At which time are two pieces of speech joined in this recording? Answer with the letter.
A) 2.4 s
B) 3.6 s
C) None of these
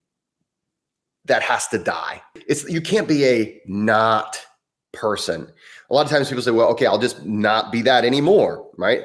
A